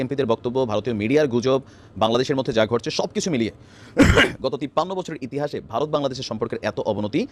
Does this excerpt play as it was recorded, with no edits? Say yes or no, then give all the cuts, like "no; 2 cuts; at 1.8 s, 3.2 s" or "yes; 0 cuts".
yes; 0 cuts